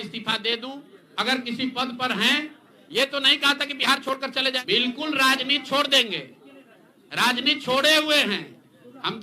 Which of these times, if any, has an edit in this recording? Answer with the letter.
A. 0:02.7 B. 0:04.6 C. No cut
B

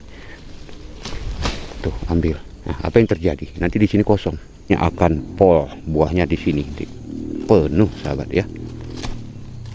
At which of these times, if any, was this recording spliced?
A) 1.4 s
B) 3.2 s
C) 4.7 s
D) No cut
C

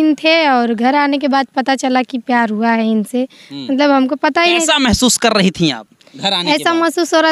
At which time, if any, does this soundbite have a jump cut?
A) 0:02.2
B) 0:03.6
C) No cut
C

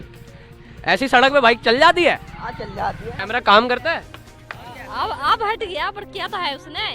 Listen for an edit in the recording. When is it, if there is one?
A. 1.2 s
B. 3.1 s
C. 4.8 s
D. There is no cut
B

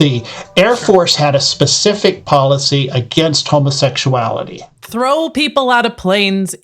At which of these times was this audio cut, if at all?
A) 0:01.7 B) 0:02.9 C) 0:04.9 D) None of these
C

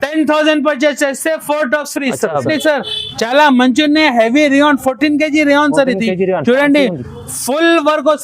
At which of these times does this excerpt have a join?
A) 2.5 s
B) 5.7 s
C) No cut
A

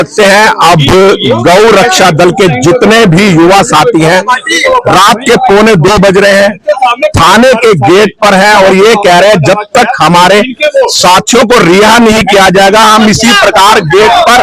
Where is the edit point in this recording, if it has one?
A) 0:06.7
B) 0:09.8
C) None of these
C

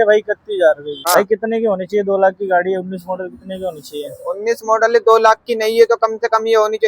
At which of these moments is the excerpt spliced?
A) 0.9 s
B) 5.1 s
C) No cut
A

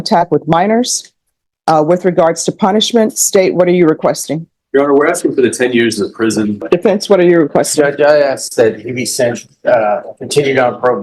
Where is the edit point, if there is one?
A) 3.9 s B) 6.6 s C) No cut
B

